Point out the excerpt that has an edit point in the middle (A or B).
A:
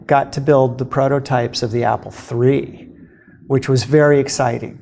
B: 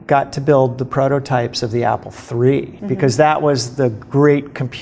B